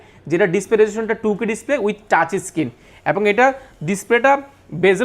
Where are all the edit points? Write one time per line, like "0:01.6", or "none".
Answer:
none